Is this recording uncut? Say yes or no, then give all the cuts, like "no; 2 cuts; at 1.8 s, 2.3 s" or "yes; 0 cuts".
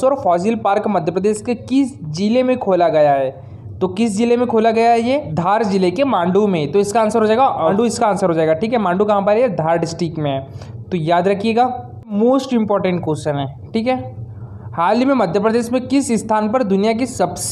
no; 3 cuts; at 5.3 s, 7.7 s, 12.1 s